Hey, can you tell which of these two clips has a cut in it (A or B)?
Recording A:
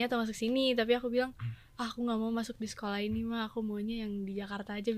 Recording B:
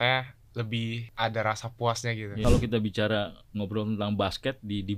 B